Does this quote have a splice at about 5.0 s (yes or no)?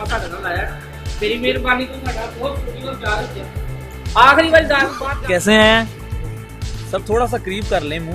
yes